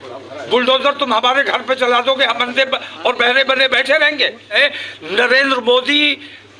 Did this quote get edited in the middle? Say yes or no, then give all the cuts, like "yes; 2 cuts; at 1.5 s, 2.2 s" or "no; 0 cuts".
yes; 1 cut; at 4.6 s